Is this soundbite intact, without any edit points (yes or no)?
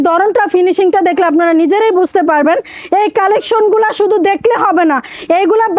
yes